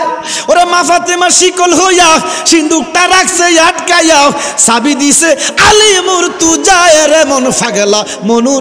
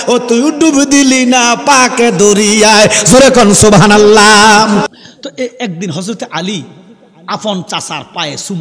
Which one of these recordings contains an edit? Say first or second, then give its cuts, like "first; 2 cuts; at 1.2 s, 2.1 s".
second; 1 cut; at 4.9 s